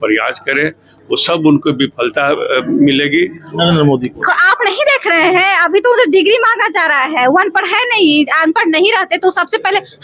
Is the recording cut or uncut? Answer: cut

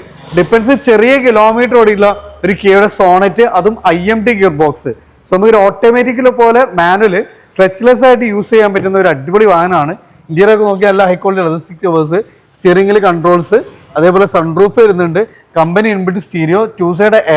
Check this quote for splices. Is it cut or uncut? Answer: uncut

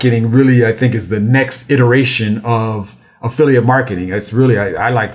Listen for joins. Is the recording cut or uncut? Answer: uncut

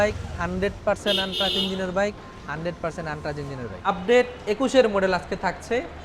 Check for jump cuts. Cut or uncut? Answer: cut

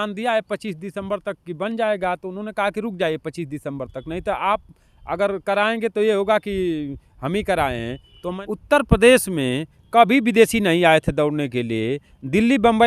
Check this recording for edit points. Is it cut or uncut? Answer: cut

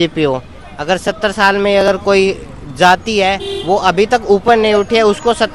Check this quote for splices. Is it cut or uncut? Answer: uncut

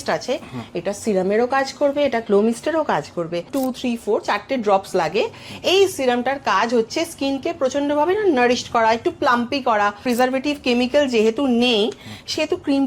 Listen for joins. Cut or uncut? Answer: cut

